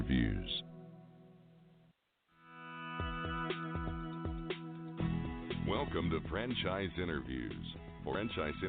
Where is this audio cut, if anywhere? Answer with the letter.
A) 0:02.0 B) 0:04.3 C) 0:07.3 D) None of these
A